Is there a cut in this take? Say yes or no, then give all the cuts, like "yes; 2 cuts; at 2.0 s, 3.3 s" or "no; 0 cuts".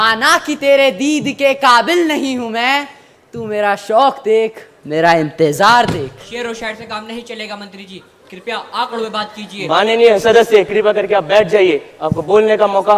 no; 0 cuts